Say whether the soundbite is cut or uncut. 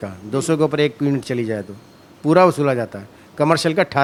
uncut